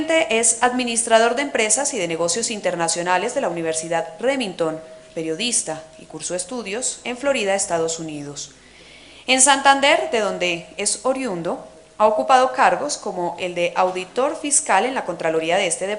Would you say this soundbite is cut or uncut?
uncut